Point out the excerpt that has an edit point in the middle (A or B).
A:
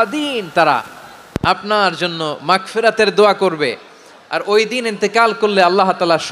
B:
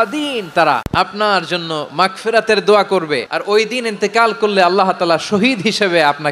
B